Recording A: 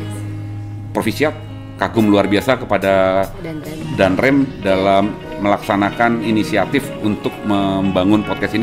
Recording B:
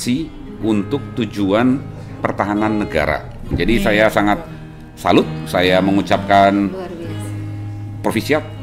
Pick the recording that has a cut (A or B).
B